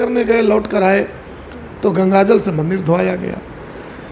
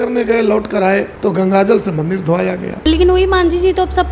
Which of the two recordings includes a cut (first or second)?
second